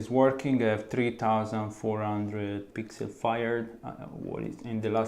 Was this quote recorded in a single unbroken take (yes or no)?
no